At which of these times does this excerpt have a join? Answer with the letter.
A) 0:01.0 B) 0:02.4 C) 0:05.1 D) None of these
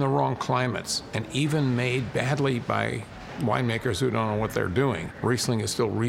C